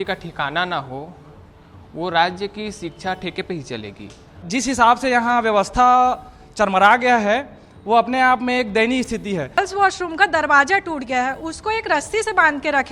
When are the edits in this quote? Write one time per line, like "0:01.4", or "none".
0:04.4
0:09.6